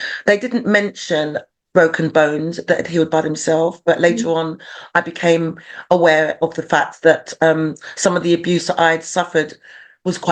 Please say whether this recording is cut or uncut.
uncut